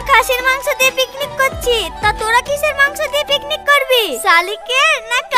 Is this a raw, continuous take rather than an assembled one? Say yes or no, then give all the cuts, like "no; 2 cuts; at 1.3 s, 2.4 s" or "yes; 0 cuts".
yes; 0 cuts